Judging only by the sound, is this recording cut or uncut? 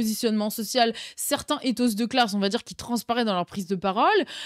uncut